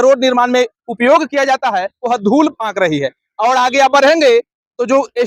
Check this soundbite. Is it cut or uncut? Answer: uncut